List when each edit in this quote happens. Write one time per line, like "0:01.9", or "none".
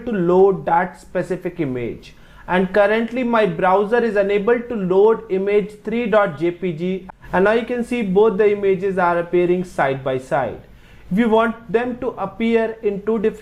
0:07.0